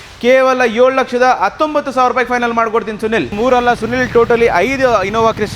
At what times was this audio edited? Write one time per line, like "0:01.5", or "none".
0:03.3